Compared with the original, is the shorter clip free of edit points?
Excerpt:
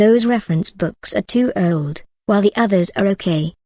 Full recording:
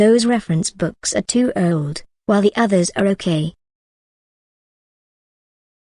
yes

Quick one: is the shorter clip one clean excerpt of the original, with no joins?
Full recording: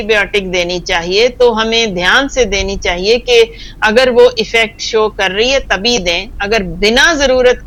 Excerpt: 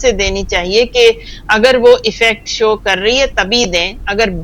yes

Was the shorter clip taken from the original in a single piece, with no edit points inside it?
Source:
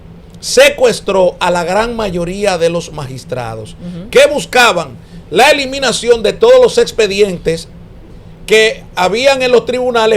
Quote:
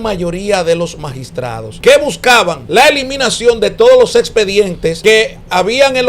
no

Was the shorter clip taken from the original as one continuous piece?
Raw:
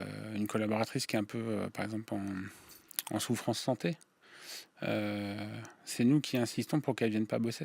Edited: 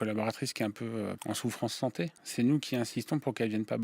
no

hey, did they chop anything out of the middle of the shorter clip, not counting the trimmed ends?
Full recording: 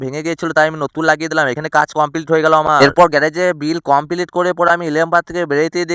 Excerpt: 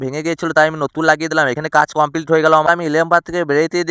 yes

